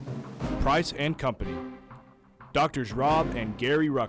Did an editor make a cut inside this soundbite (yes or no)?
no